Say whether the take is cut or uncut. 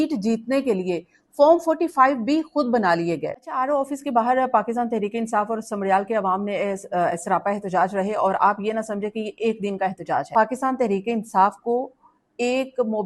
cut